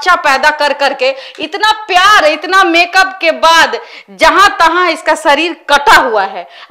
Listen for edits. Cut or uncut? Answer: uncut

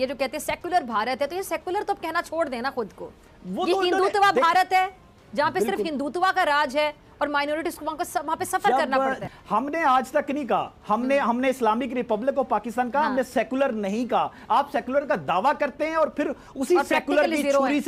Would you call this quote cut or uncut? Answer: uncut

